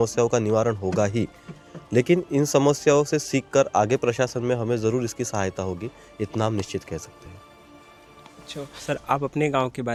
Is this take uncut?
yes; 0 cuts

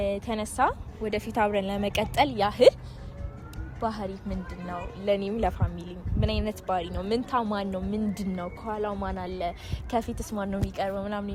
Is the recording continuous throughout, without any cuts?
yes; 0 cuts

